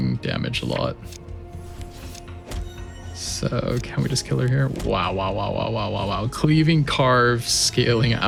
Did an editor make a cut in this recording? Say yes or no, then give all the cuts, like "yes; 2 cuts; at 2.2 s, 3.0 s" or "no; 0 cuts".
no; 0 cuts